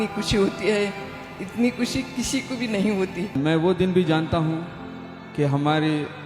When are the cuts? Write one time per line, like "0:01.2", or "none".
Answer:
0:03.4